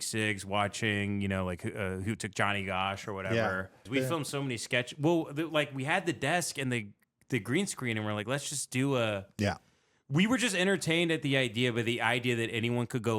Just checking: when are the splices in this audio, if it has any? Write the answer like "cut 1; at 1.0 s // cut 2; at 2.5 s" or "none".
cut 1; at 3.9 s

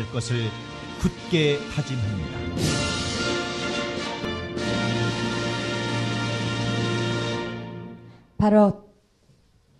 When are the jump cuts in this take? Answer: cut 1; at 4.2 s

